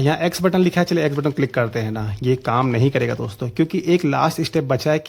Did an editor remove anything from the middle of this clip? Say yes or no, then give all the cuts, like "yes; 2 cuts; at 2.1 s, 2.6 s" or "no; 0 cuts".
no; 0 cuts